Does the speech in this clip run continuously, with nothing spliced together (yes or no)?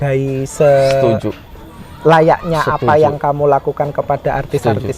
yes